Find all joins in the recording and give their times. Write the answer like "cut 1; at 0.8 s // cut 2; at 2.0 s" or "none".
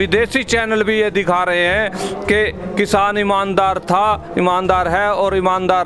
none